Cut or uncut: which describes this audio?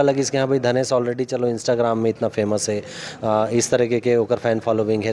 uncut